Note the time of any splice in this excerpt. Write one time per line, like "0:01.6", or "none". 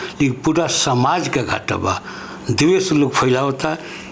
none